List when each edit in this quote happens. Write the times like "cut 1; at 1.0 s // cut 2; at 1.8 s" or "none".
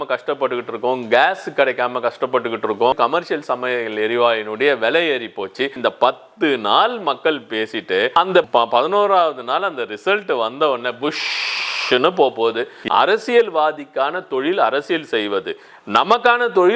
cut 1; at 3.0 s // cut 2; at 5.8 s // cut 3; at 12.7 s